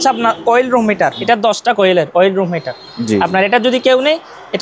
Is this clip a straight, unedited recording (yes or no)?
no